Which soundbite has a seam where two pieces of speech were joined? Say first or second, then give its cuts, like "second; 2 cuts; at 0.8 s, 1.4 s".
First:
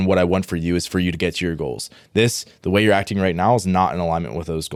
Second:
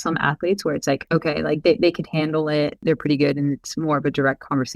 second; 2 cuts; at 1.0 s, 2.8 s